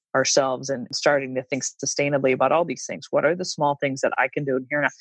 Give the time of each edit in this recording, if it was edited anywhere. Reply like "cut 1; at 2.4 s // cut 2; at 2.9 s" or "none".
cut 1; at 0.9 s